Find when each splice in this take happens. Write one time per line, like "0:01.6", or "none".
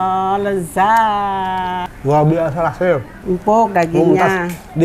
0:01.9
0:03.1